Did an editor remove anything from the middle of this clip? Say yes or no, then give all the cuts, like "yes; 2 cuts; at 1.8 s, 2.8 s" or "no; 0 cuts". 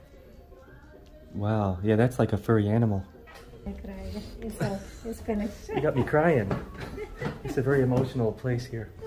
yes; 1 cut; at 3.7 s